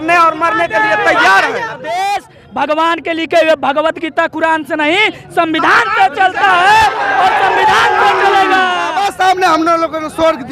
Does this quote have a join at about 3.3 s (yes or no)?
no